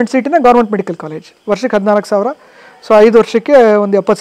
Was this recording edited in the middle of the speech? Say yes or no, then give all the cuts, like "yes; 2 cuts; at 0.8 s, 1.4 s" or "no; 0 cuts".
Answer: yes; 1 cut; at 1.3 s